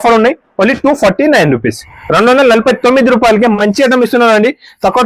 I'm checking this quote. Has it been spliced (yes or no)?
no